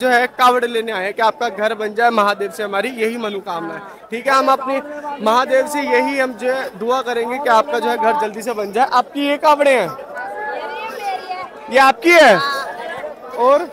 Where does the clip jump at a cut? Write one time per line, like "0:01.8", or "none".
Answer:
none